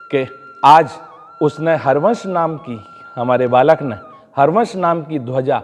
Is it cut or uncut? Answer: uncut